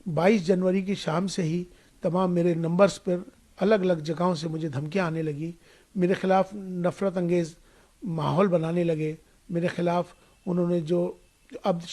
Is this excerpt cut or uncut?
uncut